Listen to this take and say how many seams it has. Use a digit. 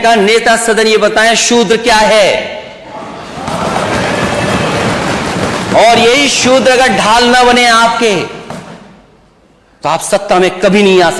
0